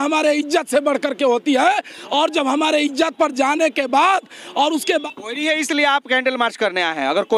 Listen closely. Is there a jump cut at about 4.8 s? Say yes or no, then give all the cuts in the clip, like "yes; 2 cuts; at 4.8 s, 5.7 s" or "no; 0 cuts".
yes; 1 cut; at 4.8 s